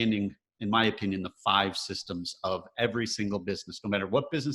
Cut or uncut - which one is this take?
uncut